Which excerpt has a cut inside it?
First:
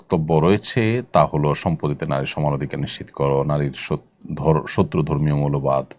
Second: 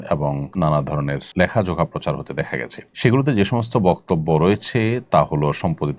second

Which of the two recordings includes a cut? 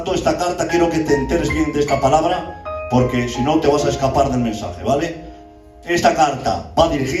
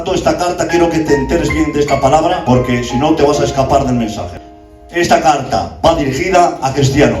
second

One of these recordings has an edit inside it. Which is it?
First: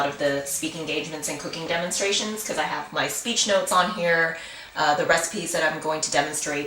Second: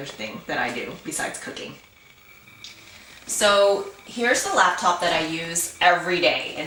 first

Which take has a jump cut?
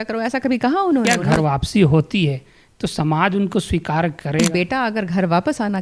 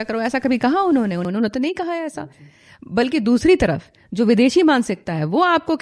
first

